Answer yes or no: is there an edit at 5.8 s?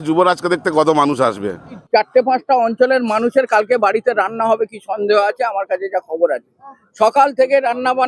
no